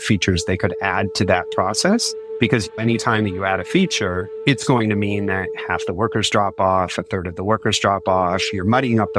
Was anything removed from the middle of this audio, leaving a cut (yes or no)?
yes